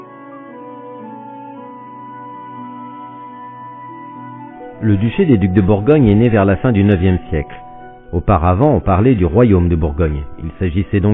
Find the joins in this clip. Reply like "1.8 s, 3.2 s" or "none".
6.0 s